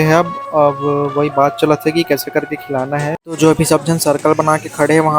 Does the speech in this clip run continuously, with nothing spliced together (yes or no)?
no